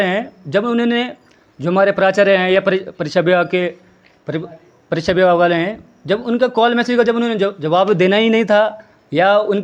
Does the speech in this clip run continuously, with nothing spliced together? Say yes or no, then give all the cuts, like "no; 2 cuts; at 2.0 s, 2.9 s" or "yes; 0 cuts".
yes; 0 cuts